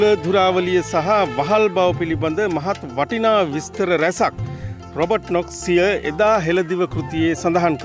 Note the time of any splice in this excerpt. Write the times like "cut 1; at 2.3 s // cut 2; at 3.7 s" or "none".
none

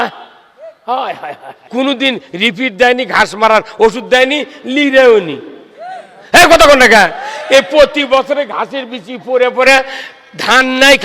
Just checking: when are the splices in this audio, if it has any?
cut 1; at 1.6 s

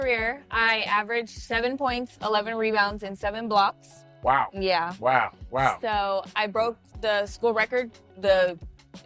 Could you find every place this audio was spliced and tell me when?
none

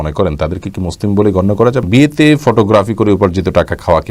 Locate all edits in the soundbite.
cut 1; at 1.9 s

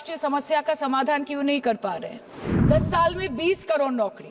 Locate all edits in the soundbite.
cut 1; at 2.5 s

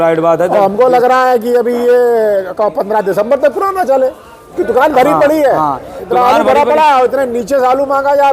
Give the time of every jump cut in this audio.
cut 1; at 4.5 s

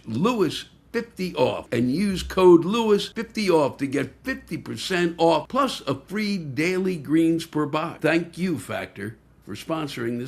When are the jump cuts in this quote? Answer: cut 1; at 1.7 s // cut 2; at 3.2 s // cut 3; at 5.5 s // cut 4; at 7.9 s

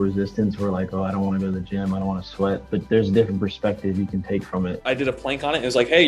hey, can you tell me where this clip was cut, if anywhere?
cut 1; at 2.7 s // cut 2; at 4.8 s

